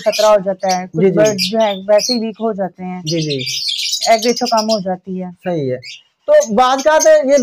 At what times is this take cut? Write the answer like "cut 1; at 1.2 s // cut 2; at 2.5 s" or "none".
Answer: none

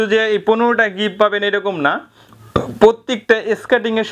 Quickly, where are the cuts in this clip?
none

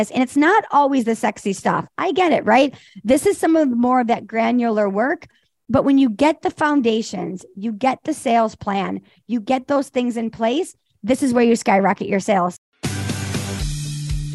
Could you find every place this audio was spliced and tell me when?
cut 1; at 12.5 s

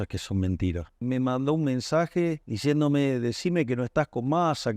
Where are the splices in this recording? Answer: cut 1; at 1.0 s // cut 2; at 2.5 s

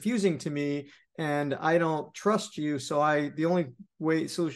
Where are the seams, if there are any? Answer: none

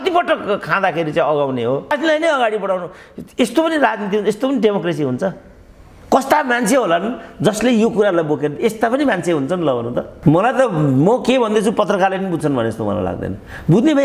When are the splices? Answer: cut 1; at 1.9 s // cut 2; at 10.1 s

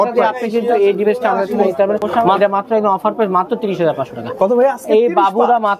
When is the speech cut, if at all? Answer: cut 1; at 2.1 s

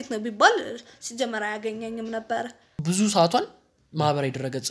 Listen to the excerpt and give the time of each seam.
cut 1; at 2.7 s

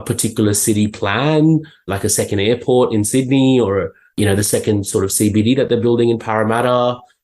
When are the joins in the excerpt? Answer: cut 1; at 1.9 s

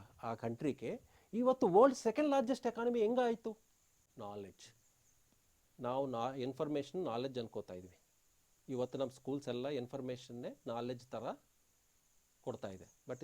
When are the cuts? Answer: cut 1; at 4.1 s

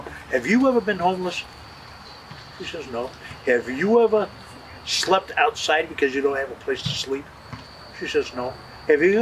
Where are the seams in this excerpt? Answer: none

